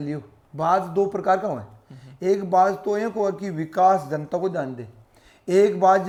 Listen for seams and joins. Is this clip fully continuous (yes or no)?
yes